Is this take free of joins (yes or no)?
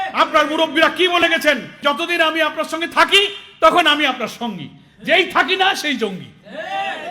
no